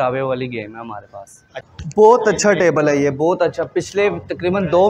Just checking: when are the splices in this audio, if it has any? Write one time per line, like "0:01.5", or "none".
0:01.6

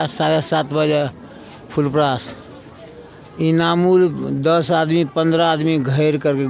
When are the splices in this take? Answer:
none

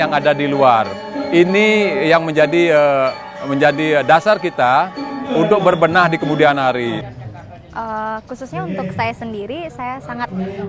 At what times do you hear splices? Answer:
0:07.0

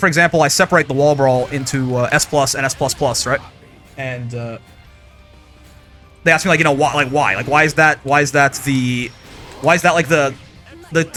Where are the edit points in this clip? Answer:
none

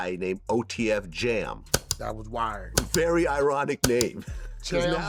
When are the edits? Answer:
none

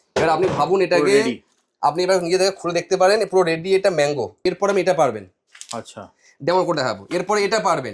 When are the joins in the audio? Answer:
0:04.3

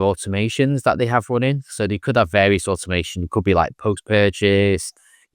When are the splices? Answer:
none

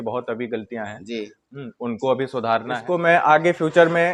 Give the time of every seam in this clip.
0:02.8

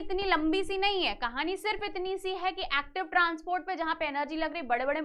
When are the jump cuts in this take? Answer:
none

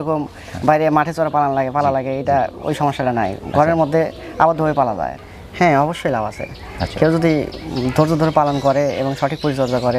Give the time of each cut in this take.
0:05.2

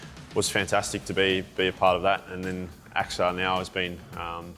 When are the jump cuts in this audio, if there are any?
none

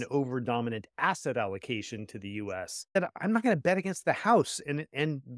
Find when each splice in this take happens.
0:02.9

